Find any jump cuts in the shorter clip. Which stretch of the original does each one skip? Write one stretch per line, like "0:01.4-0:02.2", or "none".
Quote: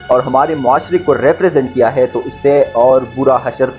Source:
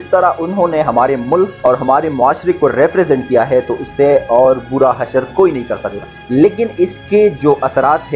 none